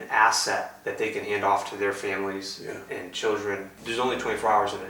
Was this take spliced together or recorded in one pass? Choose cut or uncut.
cut